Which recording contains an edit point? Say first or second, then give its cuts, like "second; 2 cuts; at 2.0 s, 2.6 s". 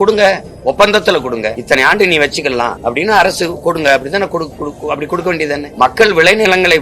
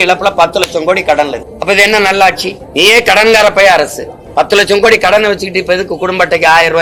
first; 3 cuts; at 1.6 s, 2.8 s, 5.7 s